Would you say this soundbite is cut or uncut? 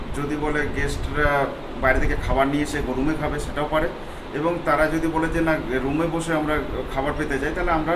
uncut